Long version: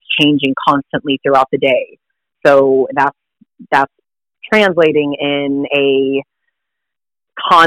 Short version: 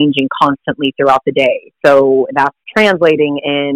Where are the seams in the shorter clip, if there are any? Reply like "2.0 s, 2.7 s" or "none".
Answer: 1.7 s, 2.6 s

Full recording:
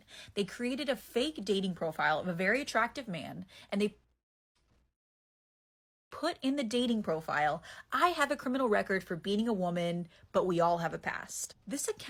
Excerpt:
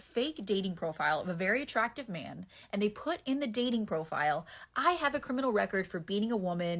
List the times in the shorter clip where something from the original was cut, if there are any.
3.0 s

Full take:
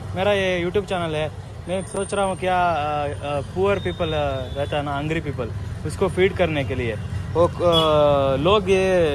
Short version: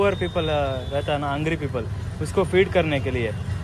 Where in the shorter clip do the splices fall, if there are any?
none

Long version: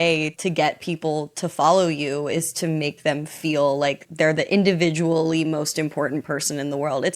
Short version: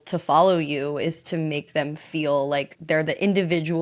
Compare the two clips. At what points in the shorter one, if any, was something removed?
none

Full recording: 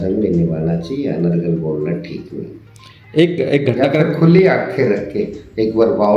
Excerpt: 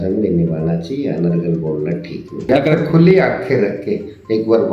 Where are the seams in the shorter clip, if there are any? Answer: 2.5 s

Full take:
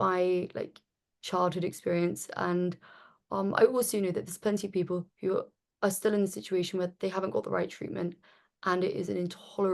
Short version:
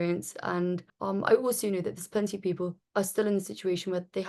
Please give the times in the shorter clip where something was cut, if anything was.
0.9 s, 2.8 s

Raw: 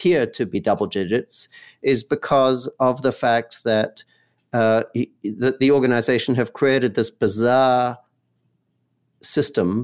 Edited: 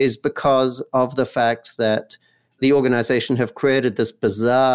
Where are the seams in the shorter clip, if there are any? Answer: 2.6 s

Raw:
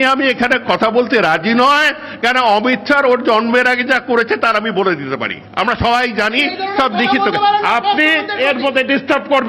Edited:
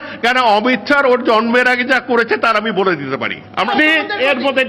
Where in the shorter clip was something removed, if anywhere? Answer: 3.7 s

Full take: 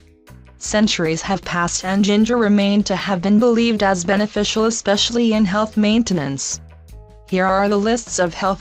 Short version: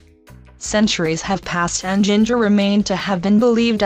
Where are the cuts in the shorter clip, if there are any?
none

